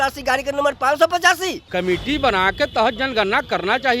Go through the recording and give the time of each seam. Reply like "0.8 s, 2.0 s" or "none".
1.6 s